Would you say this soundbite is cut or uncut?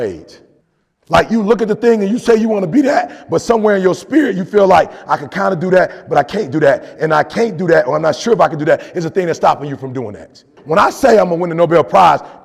cut